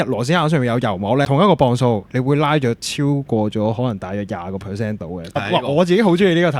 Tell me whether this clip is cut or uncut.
cut